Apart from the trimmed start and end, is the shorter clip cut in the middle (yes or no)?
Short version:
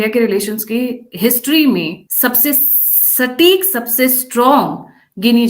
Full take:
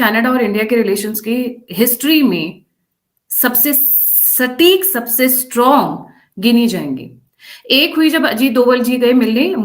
yes